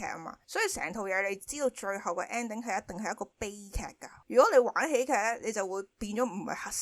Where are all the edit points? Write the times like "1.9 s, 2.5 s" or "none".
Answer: 4.1 s